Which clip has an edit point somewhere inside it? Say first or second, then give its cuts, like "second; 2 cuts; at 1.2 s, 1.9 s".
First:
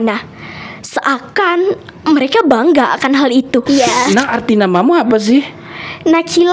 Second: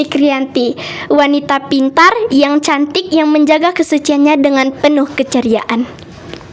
first; 1 cut; at 3.6 s